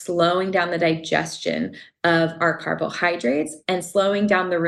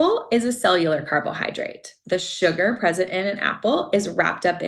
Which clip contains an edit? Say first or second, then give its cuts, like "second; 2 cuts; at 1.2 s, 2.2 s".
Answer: second; 1 cut; at 1.9 s